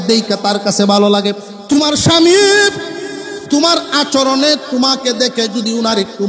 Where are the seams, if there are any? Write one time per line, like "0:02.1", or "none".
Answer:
0:01.5

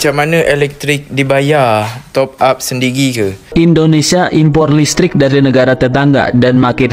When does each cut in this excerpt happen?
0:03.5

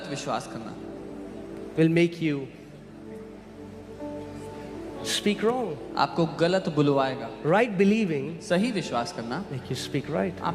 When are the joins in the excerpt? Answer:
none

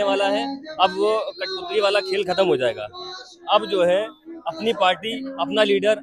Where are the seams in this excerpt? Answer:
none

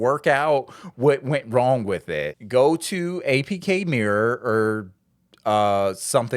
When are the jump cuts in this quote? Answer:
0:02.3

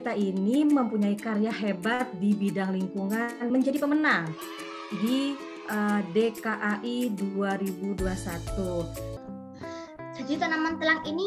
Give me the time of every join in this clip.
0:09.2

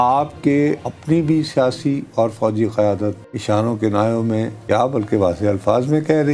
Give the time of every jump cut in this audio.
0:00.9
0:03.3
0:04.5

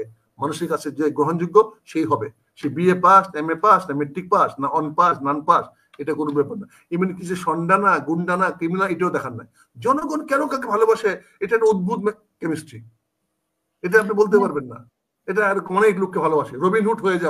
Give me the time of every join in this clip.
none

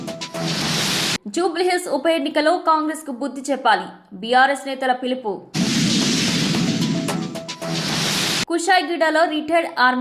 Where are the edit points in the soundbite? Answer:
none

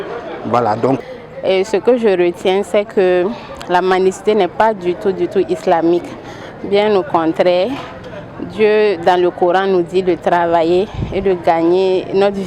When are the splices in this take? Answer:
0:01.0

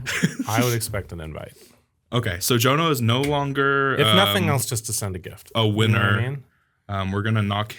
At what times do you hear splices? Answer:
none

